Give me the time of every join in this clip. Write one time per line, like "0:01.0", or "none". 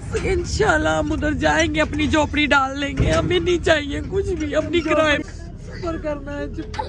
0:05.2